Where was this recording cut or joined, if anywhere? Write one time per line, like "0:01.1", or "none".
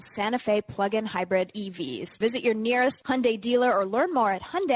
0:02.1